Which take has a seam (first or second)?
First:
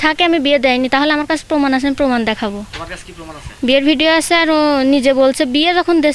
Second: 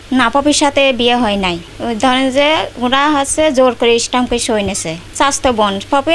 second